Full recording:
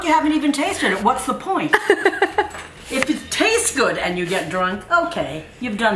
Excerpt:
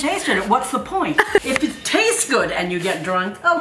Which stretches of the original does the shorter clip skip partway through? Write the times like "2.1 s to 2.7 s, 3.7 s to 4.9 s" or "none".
2.0 s to 2.9 s